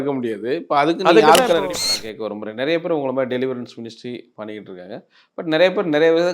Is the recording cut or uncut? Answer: cut